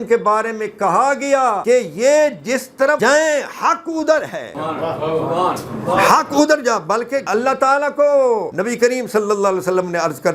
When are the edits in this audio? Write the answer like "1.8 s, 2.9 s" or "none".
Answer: 1.6 s, 3.0 s, 4.5 s, 7.2 s, 8.5 s